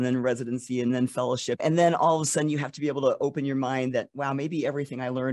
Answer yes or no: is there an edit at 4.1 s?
no